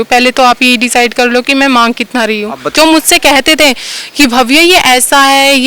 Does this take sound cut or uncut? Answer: cut